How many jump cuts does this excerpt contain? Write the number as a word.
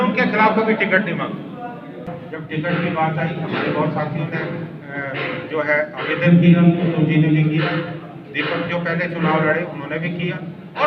one